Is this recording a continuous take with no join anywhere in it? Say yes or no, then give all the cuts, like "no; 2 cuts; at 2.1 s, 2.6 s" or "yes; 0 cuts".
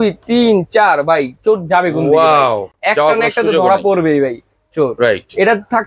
yes; 0 cuts